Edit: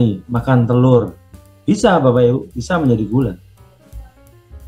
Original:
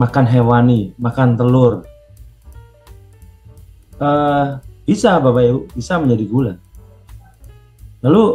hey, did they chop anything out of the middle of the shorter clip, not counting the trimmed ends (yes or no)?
yes